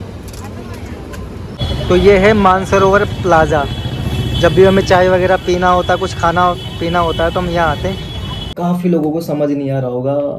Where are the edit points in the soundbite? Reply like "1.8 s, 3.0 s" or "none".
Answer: 8.5 s